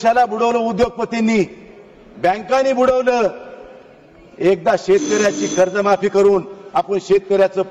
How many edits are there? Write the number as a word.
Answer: zero